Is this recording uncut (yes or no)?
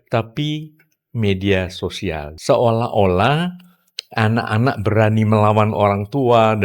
no